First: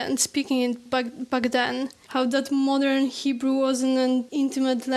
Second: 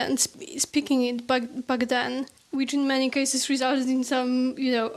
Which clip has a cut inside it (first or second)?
first